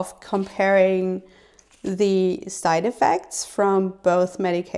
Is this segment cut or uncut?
uncut